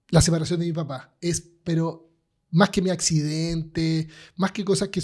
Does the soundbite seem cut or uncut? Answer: uncut